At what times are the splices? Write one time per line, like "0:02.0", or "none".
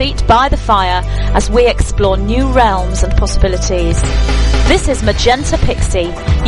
none